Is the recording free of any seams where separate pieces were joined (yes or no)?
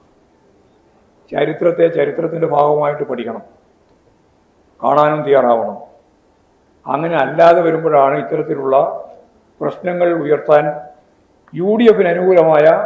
yes